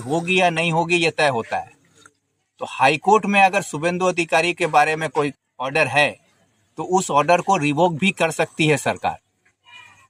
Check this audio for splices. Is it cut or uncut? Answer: uncut